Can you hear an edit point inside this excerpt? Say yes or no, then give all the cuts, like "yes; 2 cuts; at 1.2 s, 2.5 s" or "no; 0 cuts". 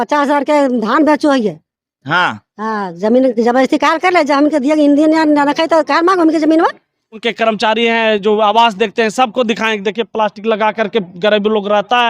yes; 1 cut; at 7.2 s